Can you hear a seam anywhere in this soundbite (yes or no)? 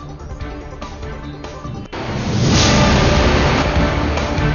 no